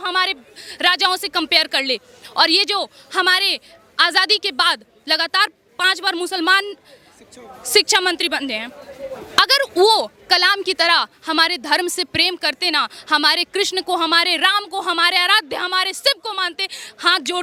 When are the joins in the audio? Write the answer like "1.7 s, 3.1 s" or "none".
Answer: none

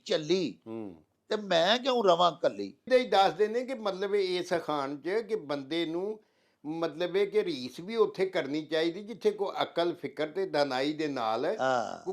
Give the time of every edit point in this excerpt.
2.9 s

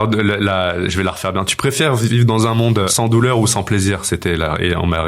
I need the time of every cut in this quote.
2.9 s

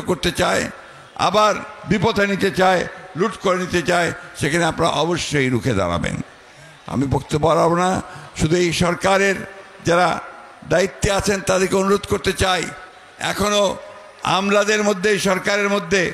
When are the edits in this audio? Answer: none

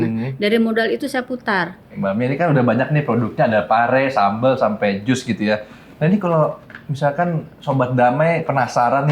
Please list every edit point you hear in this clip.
1.9 s

